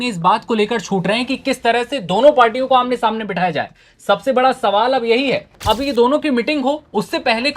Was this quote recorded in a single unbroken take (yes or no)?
no